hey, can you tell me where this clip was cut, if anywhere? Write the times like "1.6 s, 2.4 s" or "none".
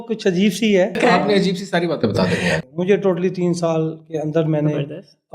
1.0 s, 2.6 s